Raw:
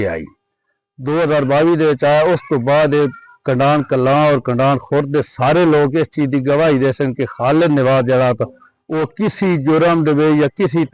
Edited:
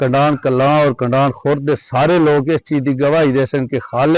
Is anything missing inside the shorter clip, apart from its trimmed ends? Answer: no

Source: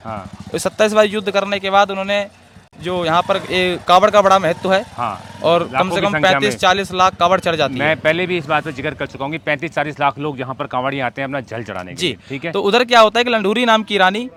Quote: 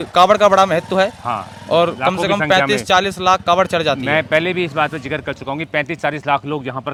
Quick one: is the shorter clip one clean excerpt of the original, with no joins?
yes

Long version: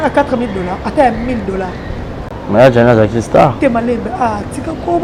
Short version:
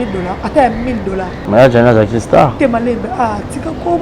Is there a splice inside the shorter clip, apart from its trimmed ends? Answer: yes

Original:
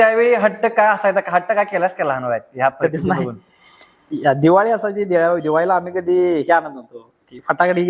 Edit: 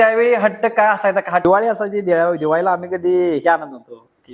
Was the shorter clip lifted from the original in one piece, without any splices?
no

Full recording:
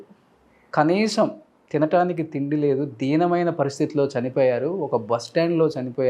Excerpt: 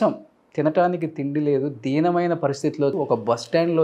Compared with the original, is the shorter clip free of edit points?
no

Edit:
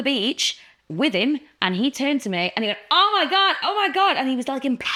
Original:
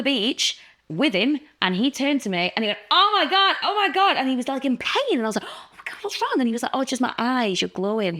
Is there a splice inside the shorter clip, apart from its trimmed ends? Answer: no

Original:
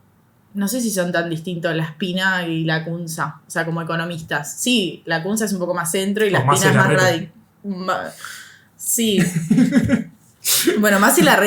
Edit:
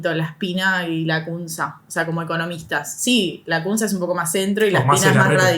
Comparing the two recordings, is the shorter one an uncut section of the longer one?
yes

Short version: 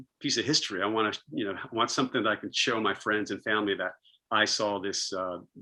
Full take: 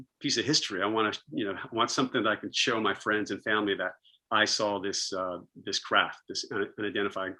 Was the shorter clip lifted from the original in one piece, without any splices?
yes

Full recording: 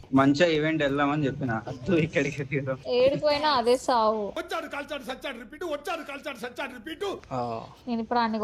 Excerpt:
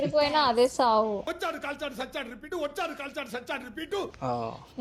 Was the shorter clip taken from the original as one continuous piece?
yes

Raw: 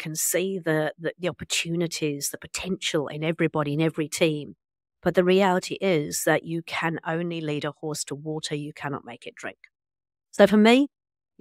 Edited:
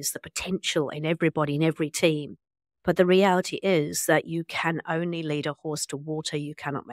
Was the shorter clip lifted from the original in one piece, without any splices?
yes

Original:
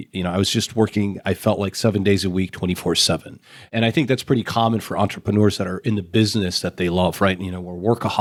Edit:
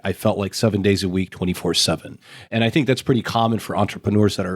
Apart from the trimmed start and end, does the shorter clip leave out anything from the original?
no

